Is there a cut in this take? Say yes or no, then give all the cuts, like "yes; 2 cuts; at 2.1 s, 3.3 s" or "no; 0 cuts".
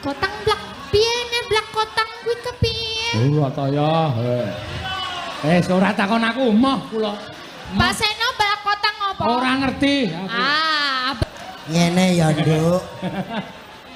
yes; 1 cut; at 11.2 s